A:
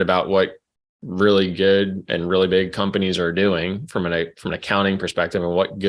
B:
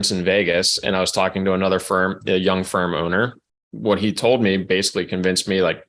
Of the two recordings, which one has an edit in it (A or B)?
B